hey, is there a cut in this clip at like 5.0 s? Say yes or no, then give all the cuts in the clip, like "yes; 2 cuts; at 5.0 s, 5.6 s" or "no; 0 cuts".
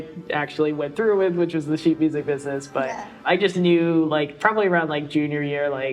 no; 1 cut; at 3.2 s